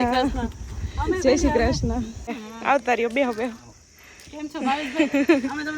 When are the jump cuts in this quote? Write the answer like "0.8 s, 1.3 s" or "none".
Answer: 2.3 s